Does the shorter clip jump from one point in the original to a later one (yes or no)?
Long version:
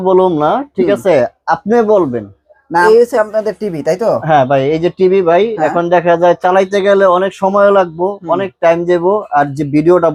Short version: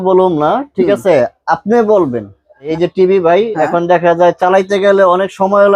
yes